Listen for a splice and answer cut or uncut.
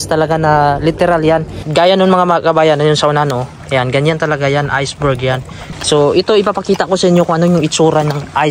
cut